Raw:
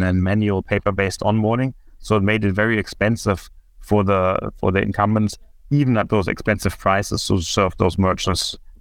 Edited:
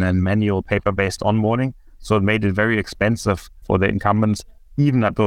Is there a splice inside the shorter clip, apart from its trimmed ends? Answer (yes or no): yes